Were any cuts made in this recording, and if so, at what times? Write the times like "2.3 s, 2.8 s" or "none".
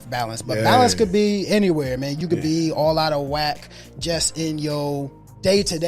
2.1 s